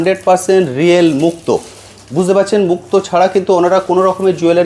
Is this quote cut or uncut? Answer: uncut